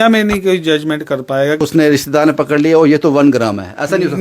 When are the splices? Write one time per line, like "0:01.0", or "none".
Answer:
0:01.6